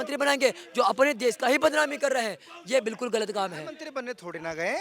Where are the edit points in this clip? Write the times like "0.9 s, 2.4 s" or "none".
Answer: none